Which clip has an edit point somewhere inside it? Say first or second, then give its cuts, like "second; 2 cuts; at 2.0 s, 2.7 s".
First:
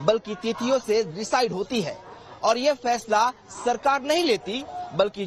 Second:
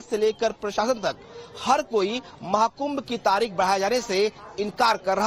second; 1 cut; at 4.1 s